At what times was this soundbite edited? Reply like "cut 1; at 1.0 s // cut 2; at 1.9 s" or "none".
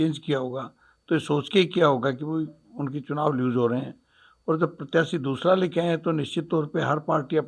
none